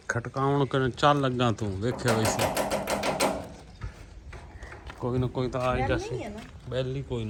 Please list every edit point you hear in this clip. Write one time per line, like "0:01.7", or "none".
none